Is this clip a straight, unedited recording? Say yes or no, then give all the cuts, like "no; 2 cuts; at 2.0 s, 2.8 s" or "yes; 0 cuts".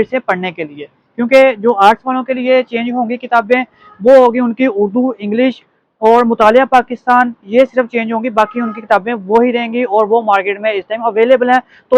yes; 0 cuts